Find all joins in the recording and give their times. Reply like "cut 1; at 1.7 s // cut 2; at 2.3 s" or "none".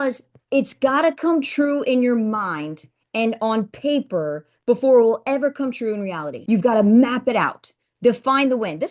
cut 1; at 6.3 s